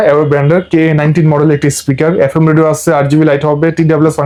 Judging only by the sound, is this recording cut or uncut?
uncut